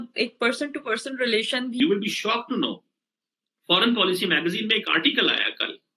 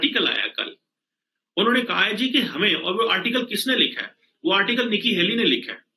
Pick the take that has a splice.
first; 1 cut; at 1.8 s

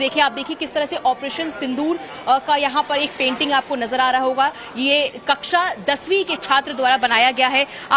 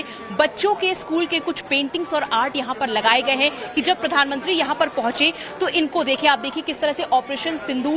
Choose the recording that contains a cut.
second; 1 cut; at 4.2 s

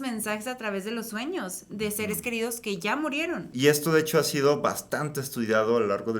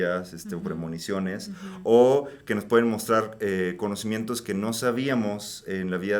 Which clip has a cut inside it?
first; 1 cut; at 3.5 s

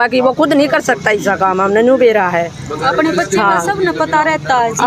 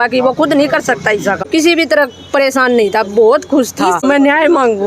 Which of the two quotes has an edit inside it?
second; 2 cuts; at 1.5 s, 4.0 s

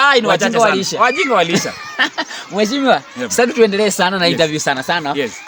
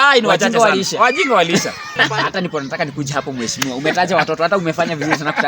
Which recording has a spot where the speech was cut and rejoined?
second; 1 cut; at 2.1 s

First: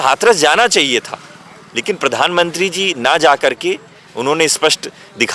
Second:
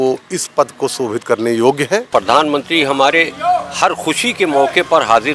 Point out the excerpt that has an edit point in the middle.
second; 1 cut; at 2.1 s

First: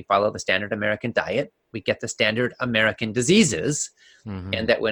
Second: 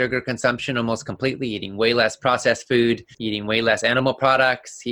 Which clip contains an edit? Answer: second; 1 cut; at 3.1 s

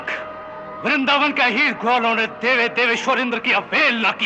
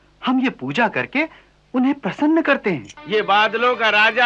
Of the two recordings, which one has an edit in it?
second; 1 cut; at 3.0 s

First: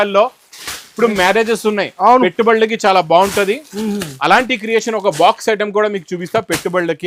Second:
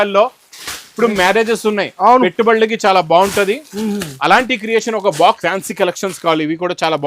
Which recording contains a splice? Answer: second; 1 cut; at 5.4 s

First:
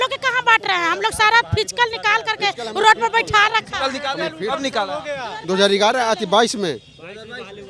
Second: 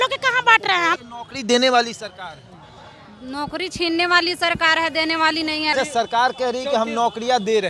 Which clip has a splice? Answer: second; 2 cuts; at 1.0 s, 5.7 s

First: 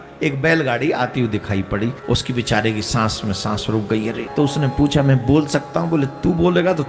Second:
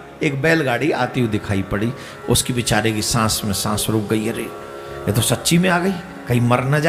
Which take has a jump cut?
first; 2 cuts; at 2.0 s, 4.2 s

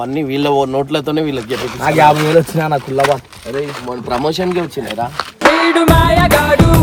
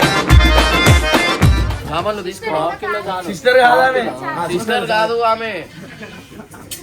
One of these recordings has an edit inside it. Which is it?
second; 1 cut; at 1.8 s

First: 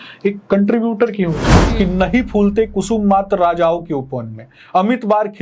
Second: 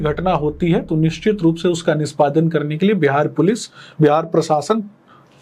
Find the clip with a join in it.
first; 1 cut; at 1.5 s

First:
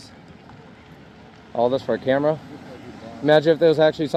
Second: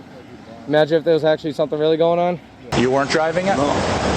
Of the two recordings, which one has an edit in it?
second; 1 cut; at 2.7 s

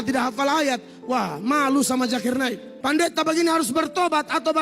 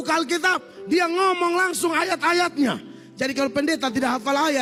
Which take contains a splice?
first; 1 cut; at 2.7 s

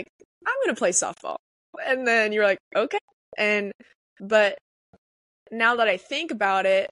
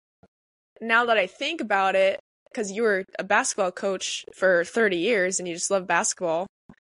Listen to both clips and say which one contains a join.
first; 1 cut; at 3.1 s

